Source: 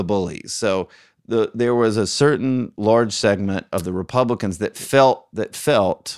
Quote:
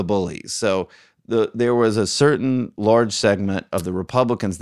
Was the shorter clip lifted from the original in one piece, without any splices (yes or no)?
yes